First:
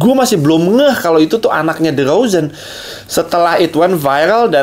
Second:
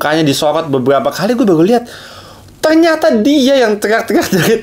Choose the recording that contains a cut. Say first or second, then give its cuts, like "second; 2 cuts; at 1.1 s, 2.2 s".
first; 1 cut; at 2.7 s